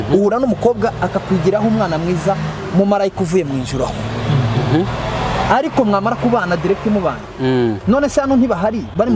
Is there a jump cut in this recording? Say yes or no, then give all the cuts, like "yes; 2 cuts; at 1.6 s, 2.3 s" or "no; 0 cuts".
no; 0 cuts